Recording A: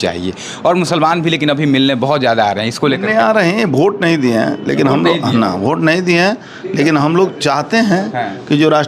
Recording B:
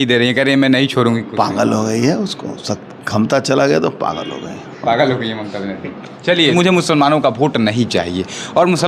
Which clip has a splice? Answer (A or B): B